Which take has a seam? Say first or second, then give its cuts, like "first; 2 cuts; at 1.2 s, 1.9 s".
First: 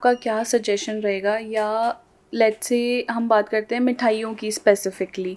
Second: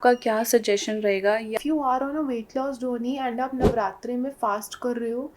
second; 1 cut; at 1.5 s